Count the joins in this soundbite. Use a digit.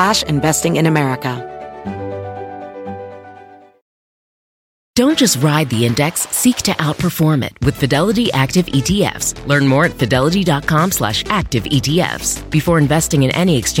1